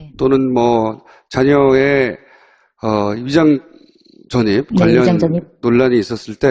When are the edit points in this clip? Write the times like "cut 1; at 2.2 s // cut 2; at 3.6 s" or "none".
none